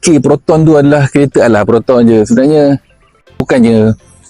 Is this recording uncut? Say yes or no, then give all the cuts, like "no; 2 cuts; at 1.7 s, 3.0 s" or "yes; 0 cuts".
no; 1 cut; at 3.4 s